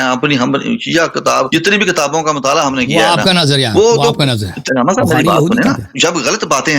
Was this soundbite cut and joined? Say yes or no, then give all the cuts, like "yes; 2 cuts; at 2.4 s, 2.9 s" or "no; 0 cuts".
yes; 3 cuts; at 1.5 s, 4.6 s, 5.9 s